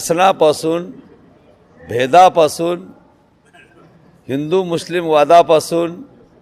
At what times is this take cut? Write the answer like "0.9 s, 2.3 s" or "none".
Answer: none